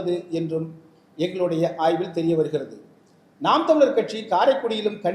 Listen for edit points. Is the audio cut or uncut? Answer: uncut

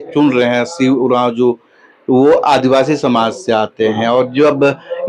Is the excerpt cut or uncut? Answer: uncut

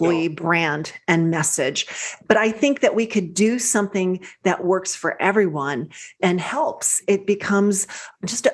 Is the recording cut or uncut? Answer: uncut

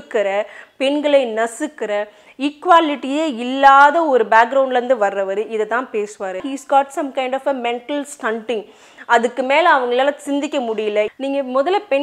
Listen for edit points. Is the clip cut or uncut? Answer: cut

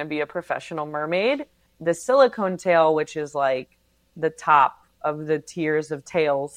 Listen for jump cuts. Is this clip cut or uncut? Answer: cut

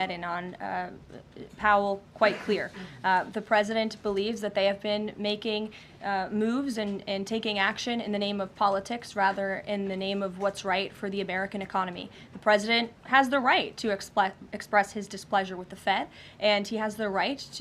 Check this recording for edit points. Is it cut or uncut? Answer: uncut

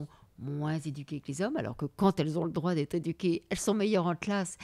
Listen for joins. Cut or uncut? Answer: uncut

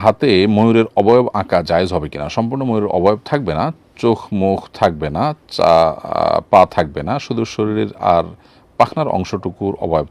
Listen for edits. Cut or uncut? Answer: uncut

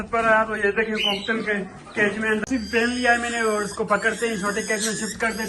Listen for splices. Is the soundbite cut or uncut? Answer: cut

